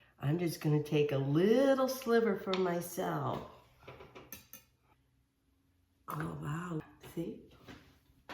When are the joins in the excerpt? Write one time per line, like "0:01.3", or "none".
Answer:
0:04.9
0:06.8